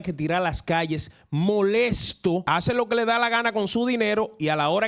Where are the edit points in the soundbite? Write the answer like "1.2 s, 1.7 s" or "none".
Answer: 2.4 s